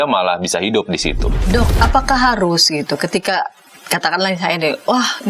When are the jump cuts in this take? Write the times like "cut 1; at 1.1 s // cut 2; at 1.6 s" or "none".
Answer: cut 1; at 1.3 s

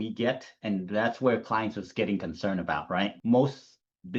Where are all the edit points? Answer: cut 1; at 3.1 s

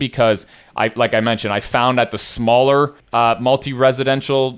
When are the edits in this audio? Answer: cut 1; at 3.0 s

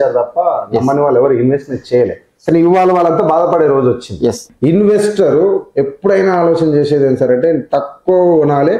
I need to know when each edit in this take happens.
cut 1; at 4.5 s

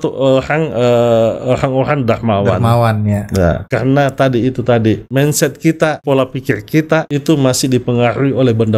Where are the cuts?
cut 1; at 3.6 s // cut 2; at 5.0 s // cut 3; at 6.0 s // cut 4; at 7.1 s

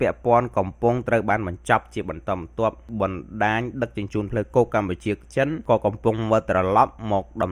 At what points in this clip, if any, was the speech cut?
cut 1; at 2.9 s // cut 2; at 5.6 s

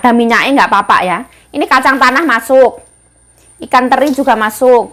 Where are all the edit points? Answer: none

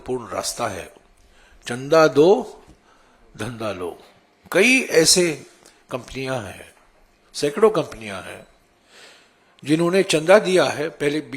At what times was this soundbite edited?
none

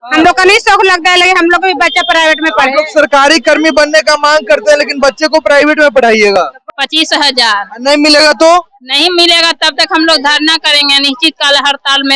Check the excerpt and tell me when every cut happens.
cut 1; at 6.7 s

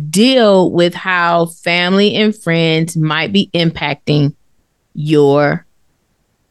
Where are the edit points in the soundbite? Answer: none

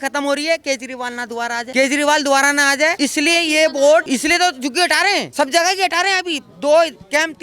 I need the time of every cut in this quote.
cut 1; at 1.7 s // cut 2; at 2.9 s // cut 3; at 4.1 s // cut 4; at 5.3 s

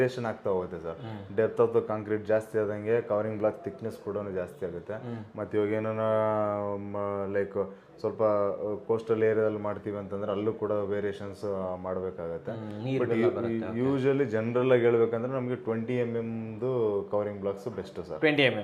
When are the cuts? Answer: none

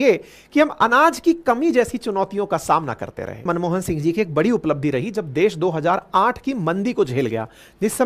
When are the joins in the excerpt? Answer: cut 1; at 3.4 s

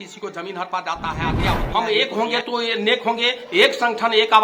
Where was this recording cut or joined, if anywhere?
cut 1; at 1.6 s

